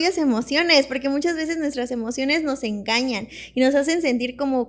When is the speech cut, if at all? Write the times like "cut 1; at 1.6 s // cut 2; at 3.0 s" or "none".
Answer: none